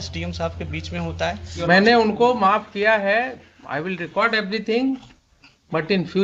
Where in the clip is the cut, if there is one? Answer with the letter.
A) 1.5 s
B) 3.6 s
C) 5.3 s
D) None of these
A